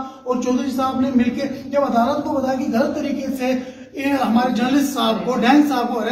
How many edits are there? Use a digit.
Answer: 0